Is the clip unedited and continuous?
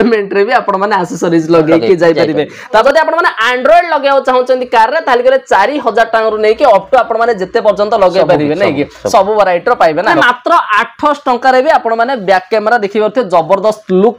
no; 2 cuts; at 2.8 s, 10.2 s

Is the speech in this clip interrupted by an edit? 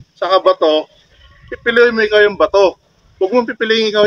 no; 0 cuts

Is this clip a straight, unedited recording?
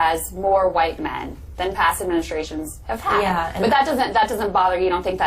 yes; 0 cuts

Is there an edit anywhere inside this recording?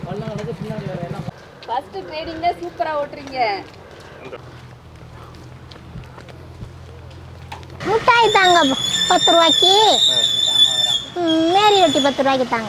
yes; 3 cuts; at 1.3 s, 4.4 s, 7.8 s

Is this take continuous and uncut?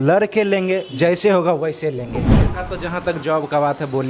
no; 1 cut; at 2.3 s

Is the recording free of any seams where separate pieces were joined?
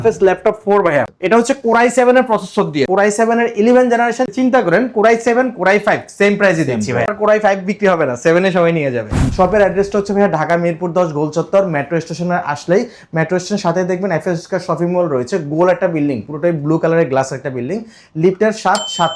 no; 4 cuts; at 2.9 s, 4.3 s, 7.1 s, 9.3 s

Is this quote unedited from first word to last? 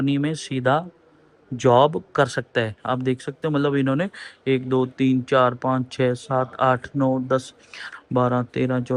yes; 0 cuts

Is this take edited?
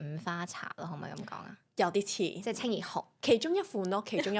no; 0 cuts

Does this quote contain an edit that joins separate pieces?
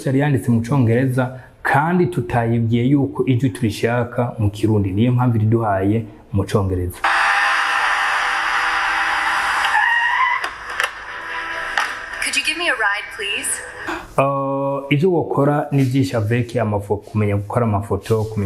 yes; 1 cut; at 13.9 s

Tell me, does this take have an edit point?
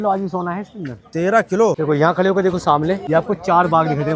yes; 2 cuts; at 1.8 s, 3.0 s

